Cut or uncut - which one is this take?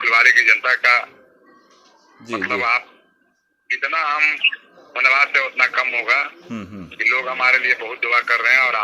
uncut